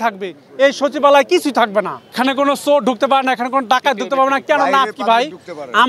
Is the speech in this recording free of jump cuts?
no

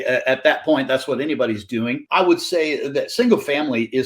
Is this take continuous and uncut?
no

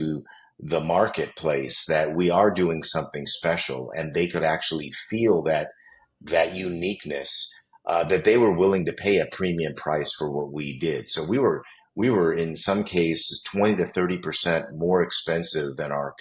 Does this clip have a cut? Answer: no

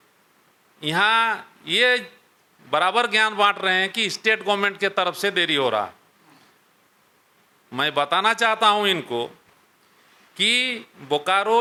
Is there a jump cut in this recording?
no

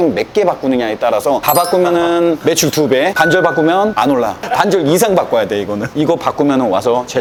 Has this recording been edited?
no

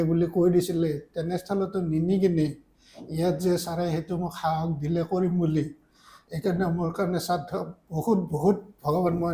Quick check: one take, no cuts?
yes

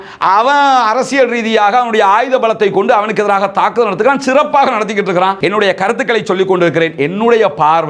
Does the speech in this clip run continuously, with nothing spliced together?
no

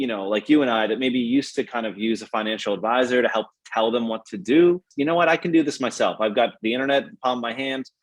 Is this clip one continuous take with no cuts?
no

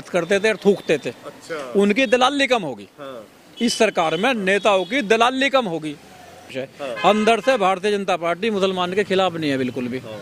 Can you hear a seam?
yes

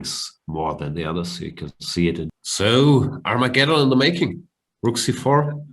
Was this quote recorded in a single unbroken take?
no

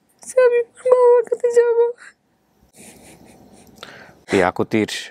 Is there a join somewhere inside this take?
no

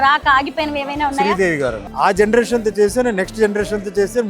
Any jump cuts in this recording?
yes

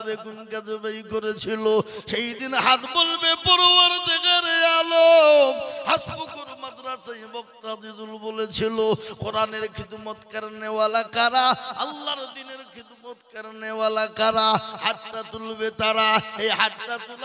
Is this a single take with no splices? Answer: yes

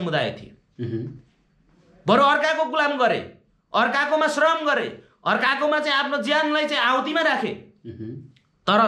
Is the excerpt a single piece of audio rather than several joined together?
yes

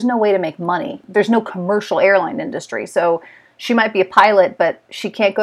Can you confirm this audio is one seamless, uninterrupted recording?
no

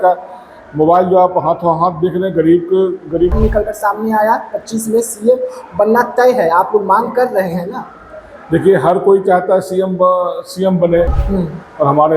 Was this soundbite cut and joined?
yes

